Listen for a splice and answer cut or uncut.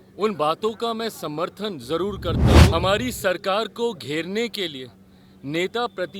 cut